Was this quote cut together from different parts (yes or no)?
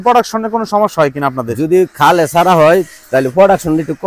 no